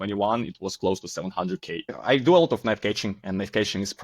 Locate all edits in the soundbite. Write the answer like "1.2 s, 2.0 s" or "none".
1.9 s